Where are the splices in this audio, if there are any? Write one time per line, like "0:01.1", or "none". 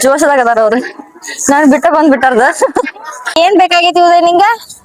0:03.4